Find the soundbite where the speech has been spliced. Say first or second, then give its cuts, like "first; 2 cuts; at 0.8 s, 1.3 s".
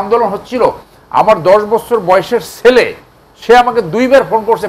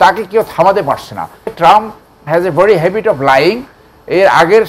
second; 1 cut; at 1.5 s